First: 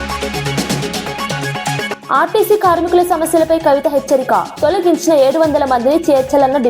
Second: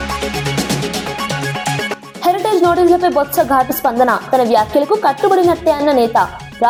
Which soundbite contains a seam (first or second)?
first